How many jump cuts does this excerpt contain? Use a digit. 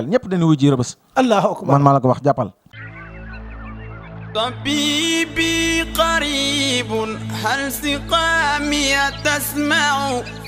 1